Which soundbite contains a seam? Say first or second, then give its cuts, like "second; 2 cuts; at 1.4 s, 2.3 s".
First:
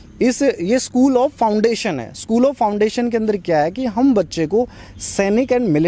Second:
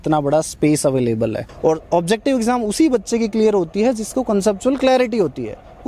second; 1 cut; at 1.5 s